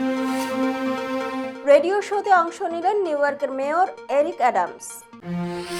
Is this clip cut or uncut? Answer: cut